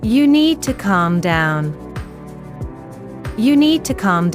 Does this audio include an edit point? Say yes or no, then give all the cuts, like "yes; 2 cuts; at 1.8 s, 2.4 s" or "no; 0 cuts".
yes; 2 cuts; at 1.8 s, 3.3 s